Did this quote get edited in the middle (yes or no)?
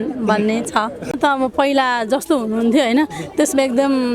yes